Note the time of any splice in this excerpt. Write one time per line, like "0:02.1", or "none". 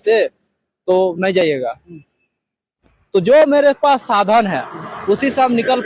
none